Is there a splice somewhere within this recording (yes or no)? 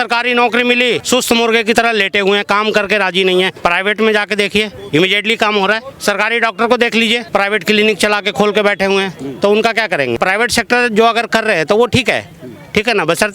yes